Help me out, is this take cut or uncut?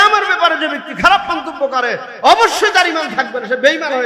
uncut